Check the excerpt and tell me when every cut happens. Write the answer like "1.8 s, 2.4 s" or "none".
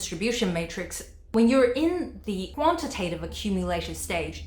2.5 s